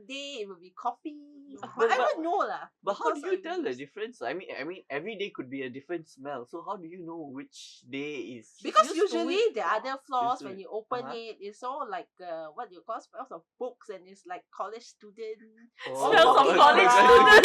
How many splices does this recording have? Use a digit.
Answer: 1